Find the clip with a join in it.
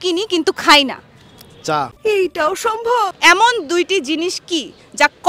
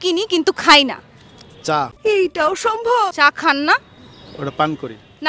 first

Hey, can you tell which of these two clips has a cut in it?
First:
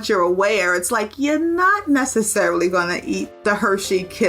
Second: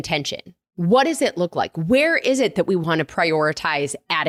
first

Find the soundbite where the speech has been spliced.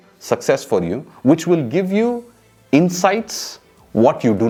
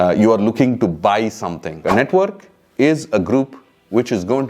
second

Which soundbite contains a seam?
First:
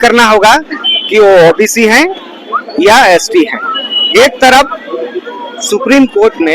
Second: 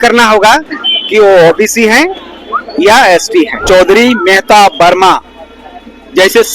second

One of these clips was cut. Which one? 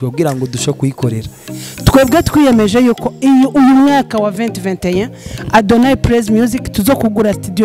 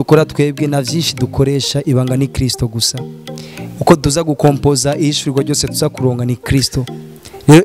first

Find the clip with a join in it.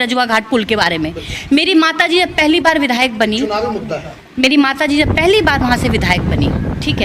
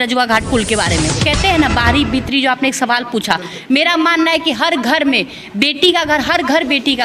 second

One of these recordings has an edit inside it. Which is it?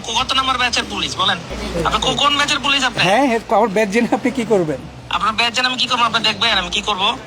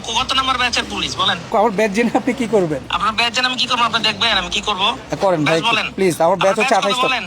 second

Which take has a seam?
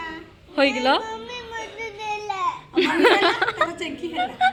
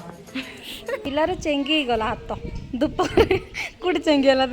second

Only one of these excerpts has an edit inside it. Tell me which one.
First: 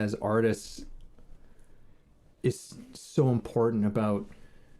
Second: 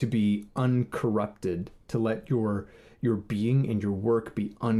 first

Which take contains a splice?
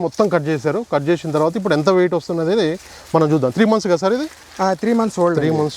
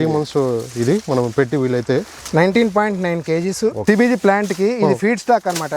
second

